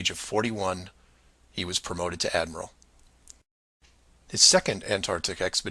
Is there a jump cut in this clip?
no; 0 cuts

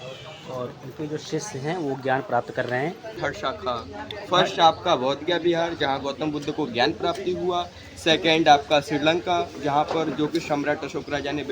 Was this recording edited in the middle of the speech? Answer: yes; 1 cut; at 3.2 s

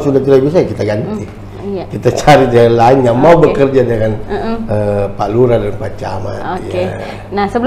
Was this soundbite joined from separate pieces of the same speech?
no; 0 cuts

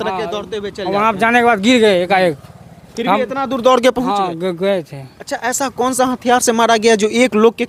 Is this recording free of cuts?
yes; 0 cuts

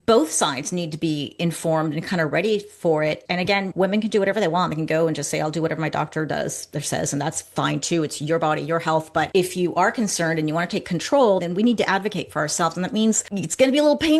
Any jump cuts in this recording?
yes; 2 cuts; at 9.3 s, 13.3 s

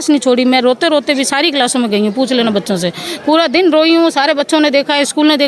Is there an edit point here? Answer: no; 0 cuts

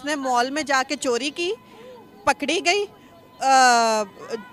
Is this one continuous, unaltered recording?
yes; 0 cuts

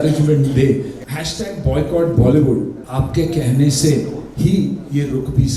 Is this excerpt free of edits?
no; 3 cuts; at 1.0 s, 2.8 s, 4.2 s

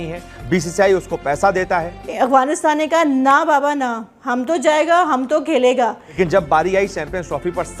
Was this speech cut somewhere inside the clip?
yes; 2 cuts; at 2.0 s, 6.1 s

